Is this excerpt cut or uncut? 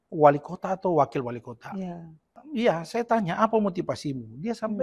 cut